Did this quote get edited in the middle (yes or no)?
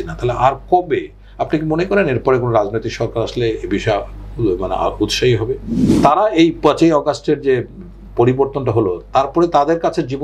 yes